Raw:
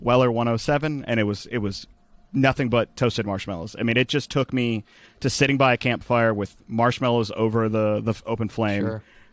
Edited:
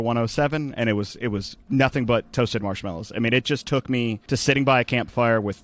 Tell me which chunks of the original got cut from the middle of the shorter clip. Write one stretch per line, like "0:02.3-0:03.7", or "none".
0:01.8-0:02.2
0:04.8-0:05.1